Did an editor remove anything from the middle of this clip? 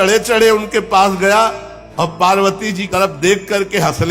no; 0 cuts

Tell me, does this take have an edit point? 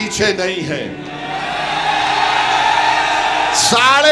no; 0 cuts

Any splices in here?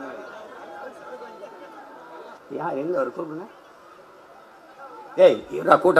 yes; 1 cut; at 2.4 s

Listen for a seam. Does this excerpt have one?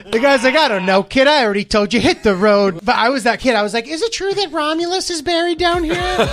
yes; 1 cut; at 2.8 s

